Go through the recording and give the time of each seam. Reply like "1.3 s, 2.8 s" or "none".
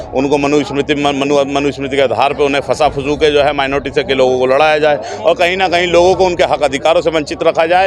none